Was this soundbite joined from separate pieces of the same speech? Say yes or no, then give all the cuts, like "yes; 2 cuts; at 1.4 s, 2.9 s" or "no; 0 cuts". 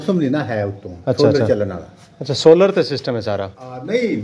no; 0 cuts